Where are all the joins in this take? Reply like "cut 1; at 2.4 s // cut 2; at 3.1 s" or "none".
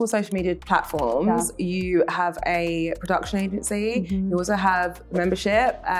none